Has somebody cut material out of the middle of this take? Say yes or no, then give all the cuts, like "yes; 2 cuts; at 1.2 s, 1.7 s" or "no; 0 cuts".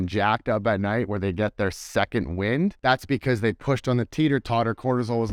no; 0 cuts